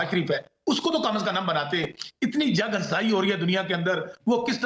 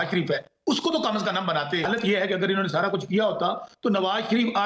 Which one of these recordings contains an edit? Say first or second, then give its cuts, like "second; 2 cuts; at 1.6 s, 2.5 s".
second; 1 cut; at 1.9 s